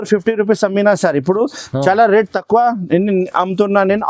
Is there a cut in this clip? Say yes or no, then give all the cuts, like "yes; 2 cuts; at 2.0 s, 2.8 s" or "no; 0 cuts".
no; 0 cuts